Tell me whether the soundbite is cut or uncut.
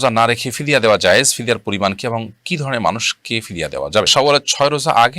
cut